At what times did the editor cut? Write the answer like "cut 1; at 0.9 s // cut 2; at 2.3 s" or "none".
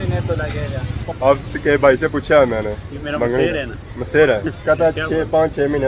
cut 1; at 0.9 s // cut 2; at 4.5 s